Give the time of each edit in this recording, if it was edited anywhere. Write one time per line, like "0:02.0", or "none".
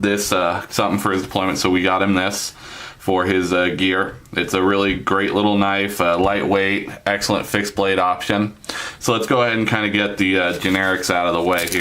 0:06.2